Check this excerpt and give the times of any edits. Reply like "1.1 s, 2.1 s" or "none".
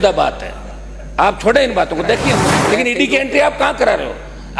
2.5 s